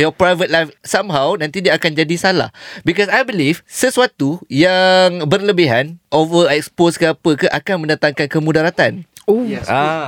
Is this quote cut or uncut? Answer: uncut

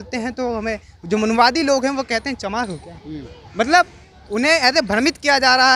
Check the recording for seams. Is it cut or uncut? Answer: uncut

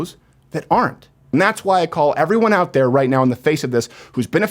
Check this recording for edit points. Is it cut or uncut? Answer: cut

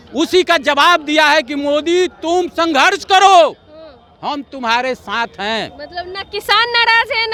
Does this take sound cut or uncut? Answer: uncut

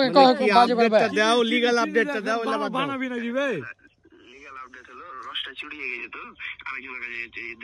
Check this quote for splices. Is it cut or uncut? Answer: uncut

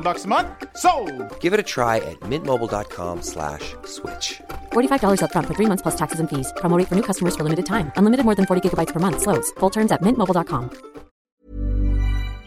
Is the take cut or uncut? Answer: cut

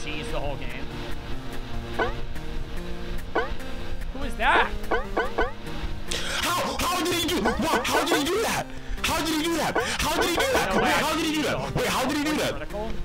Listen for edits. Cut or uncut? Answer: uncut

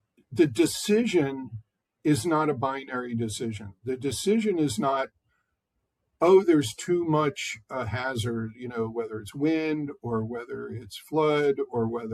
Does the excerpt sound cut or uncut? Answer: uncut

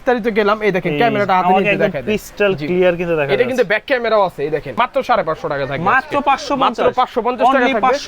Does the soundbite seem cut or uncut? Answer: cut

